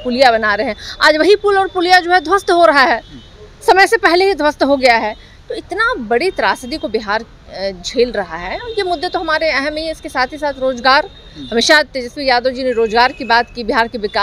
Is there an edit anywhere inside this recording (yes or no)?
no